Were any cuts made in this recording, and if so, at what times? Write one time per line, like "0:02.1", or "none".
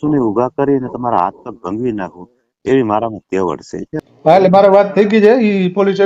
0:03.9